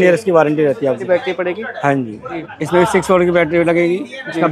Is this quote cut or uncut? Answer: cut